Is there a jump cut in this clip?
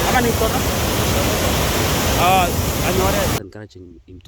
yes; 1 cut; at 3.4 s

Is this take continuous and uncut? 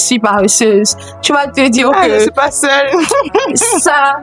yes; 0 cuts

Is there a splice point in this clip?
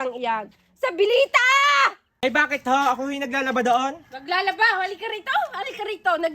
yes; 1 cut; at 2.0 s

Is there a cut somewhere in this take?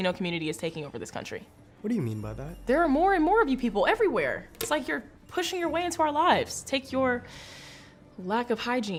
no; 0 cuts

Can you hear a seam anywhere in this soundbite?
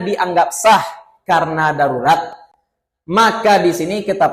no; 0 cuts

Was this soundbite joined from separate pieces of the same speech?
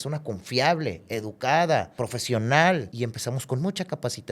yes; 2 cuts; at 1.9 s, 2.9 s

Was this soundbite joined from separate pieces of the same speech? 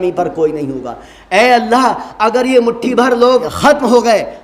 yes; 1 cut; at 3.5 s

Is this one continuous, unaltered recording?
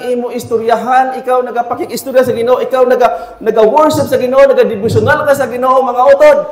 yes; 0 cuts

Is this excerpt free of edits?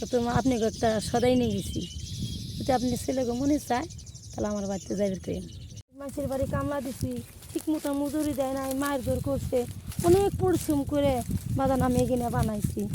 no; 1 cut; at 6.0 s

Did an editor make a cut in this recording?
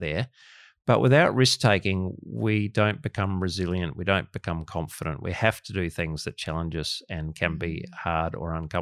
no; 0 cuts

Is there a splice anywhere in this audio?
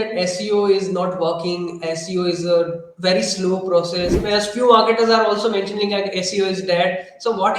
yes; 1 cut; at 4.2 s

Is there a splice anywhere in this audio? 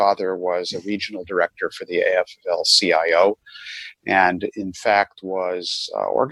no; 0 cuts

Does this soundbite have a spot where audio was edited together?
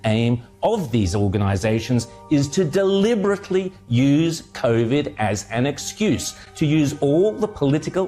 no; 0 cuts

